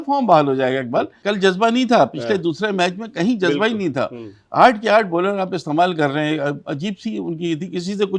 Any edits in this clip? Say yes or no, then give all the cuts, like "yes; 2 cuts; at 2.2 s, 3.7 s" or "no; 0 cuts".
yes; 1 cut; at 1.2 s